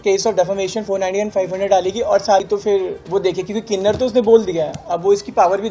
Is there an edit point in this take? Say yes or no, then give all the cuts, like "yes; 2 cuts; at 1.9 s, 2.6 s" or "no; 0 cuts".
yes; 1 cut; at 2.4 s